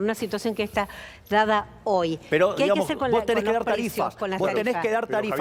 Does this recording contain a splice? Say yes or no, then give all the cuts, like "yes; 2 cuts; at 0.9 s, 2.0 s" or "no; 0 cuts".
no; 0 cuts